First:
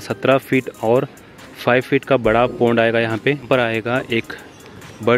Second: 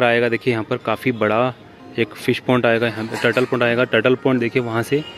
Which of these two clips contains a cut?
first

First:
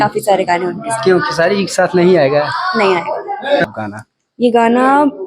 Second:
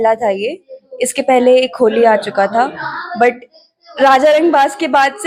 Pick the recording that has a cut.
first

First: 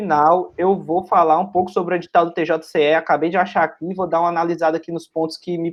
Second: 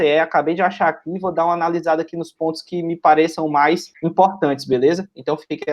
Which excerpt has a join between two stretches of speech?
second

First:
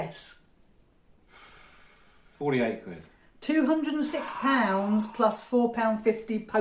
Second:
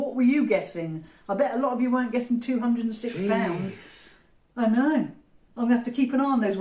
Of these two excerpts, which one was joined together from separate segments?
first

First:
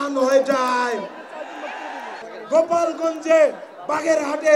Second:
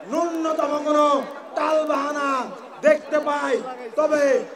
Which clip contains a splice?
first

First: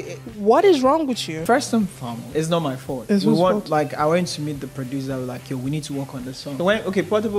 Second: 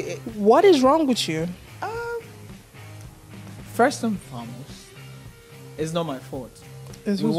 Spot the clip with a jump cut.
first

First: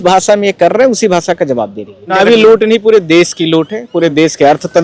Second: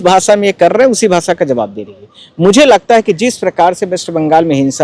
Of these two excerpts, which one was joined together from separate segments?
first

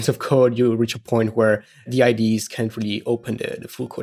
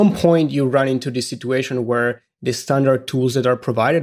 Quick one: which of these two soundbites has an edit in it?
first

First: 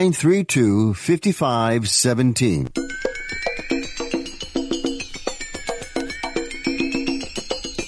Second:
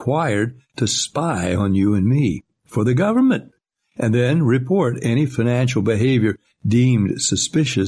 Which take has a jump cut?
first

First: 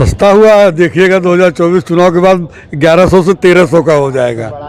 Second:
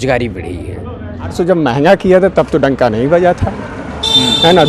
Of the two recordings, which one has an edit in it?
second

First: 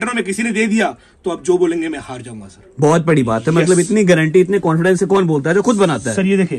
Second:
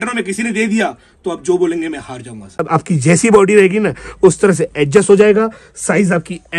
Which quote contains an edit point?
second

